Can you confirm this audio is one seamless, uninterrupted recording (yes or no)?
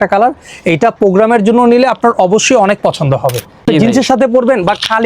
no